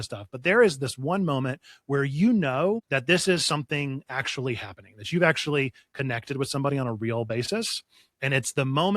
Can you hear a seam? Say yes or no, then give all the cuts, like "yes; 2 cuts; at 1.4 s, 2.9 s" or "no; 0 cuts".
yes; 1 cut; at 2.9 s